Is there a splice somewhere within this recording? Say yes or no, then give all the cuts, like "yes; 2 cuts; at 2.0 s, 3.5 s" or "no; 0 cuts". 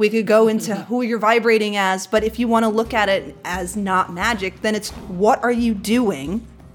no; 0 cuts